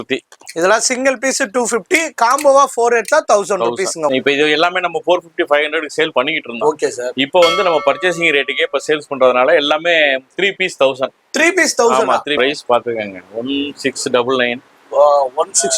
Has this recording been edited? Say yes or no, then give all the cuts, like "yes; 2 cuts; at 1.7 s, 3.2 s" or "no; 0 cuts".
yes; 2 cuts; at 4.1 s, 12.4 s